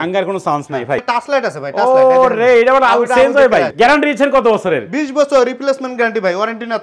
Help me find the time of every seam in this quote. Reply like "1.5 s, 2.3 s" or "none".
1.0 s, 3.7 s